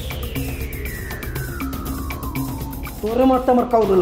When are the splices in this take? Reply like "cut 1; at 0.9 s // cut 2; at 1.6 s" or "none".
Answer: cut 1; at 2.8 s

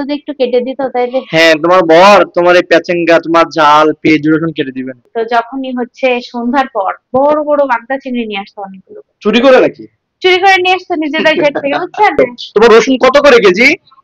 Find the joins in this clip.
cut 1; at 5.0 s // cut 2; at 12.2 s

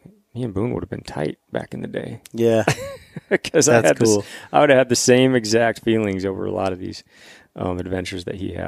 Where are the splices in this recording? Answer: none

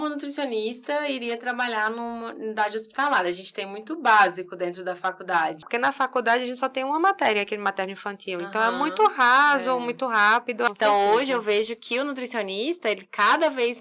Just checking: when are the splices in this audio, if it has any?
cut 1; at 5.7 s // cut 2; at 10.7 s

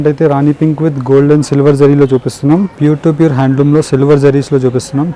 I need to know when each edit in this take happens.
cut 1; at 2.7 s

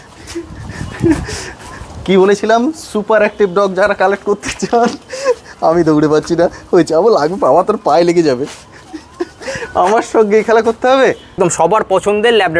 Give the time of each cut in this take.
cut 1; at 11.3 s

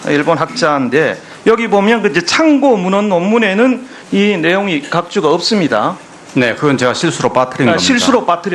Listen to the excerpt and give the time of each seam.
none

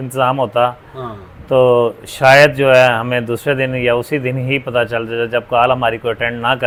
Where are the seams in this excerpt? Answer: none

